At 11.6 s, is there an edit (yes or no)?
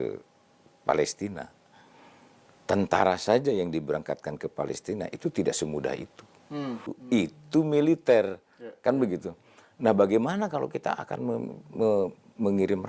no